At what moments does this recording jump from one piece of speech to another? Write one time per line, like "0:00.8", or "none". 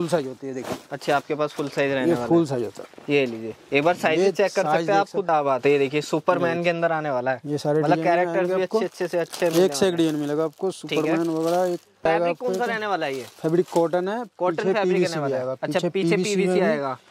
0:05.3
0:12.0